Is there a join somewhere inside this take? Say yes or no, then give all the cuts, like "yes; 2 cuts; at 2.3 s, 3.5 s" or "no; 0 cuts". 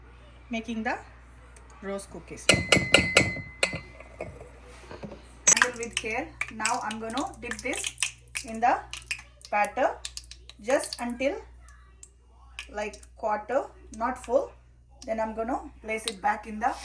yes; 1 cut; at 5.5 s